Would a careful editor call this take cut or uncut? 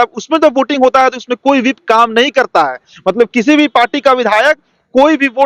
uncut